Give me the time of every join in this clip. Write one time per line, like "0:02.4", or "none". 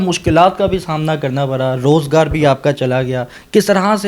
none